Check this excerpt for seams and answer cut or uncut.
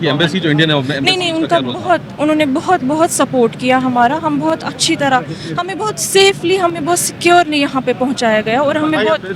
uncut